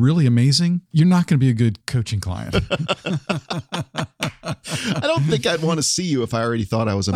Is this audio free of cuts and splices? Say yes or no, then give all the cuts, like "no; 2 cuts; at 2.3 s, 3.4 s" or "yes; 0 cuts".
no; 2 cuts; at 0.8 s, 1.9 s